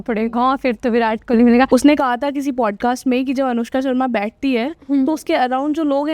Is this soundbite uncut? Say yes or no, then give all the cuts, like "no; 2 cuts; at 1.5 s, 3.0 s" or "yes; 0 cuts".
no; 1 cut; at 1.7 s